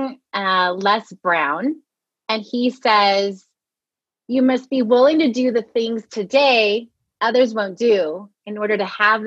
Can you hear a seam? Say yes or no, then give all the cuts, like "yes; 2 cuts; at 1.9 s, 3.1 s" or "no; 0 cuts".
no; 0 cuts